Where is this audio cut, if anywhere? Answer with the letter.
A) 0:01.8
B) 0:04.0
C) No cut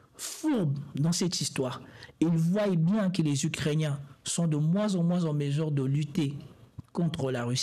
C